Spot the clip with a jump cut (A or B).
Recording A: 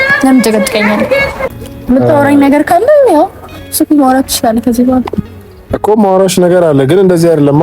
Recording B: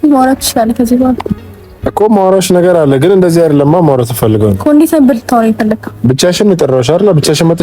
A